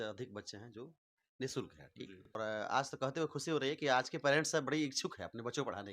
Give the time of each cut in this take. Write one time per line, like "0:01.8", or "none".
0:02.4